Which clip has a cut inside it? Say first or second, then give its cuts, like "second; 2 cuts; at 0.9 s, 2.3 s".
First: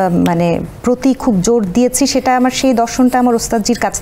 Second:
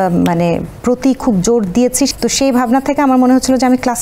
second; 1 cut; at 2.1 s